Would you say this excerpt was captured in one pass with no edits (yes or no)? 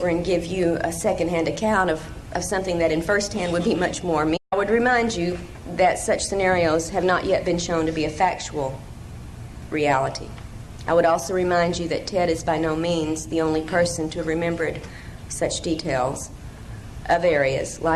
yes